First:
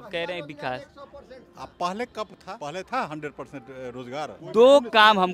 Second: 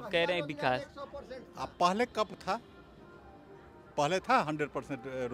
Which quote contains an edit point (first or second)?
first